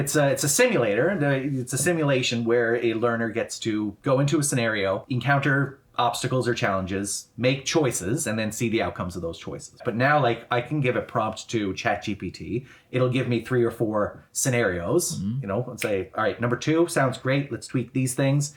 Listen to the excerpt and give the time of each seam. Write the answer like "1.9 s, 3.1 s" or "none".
4.0 s, 5.1 s, 9.8 s